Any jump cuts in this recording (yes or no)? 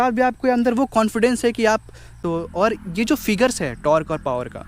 yes